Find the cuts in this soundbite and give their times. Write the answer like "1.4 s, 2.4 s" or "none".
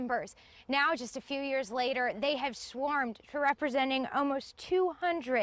none